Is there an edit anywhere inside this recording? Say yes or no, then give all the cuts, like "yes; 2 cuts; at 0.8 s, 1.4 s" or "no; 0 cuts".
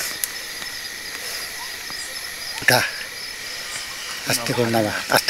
yes; 1 cut; at 2.6 s